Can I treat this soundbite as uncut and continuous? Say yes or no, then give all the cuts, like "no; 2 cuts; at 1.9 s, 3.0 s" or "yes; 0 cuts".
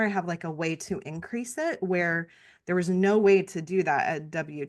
yes; 0 cuts